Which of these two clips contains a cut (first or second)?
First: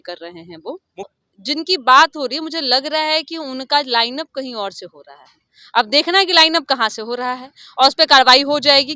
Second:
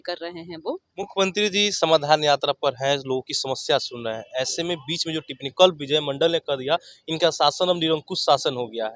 first